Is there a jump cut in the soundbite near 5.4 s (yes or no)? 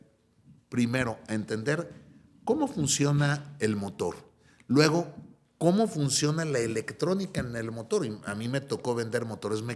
no